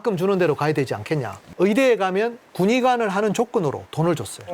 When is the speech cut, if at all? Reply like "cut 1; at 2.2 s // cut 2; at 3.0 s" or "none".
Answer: cut 1; at 1.4 s